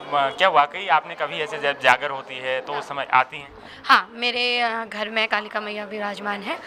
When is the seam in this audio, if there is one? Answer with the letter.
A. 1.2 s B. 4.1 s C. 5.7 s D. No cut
D